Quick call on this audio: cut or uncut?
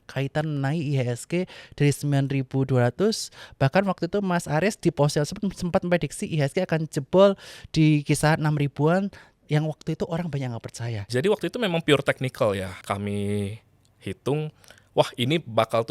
cut